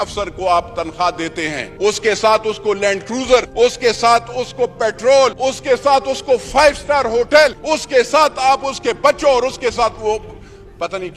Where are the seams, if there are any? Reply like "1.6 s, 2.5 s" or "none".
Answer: 1.6 s, 3.5 s, 5.4 s, 7.6 s